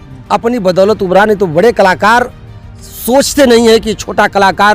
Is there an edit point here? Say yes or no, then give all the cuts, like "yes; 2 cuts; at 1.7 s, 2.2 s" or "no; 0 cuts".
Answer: no; 0 cuts